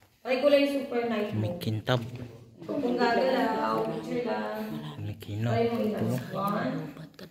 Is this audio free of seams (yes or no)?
yes